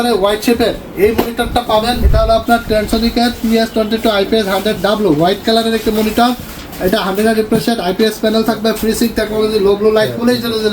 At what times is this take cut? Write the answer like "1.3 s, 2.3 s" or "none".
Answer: 2.1 s